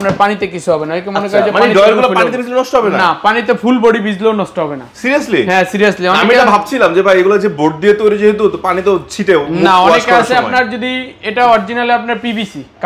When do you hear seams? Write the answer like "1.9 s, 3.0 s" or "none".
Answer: none